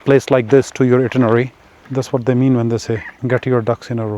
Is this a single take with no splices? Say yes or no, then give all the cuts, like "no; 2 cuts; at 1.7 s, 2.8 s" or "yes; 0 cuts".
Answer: no; 2 cuts; at 1.8 s, 3.1 s